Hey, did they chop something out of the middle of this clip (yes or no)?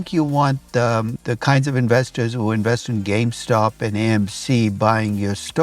yes